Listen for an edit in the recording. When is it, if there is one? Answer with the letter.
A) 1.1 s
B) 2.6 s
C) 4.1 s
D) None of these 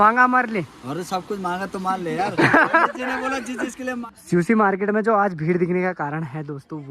C